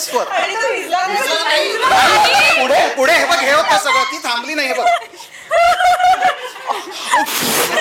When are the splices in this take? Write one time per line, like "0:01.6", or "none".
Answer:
none